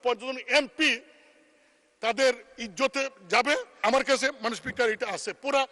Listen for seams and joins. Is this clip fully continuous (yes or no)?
no